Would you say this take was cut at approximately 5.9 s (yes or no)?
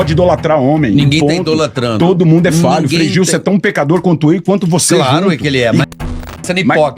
yes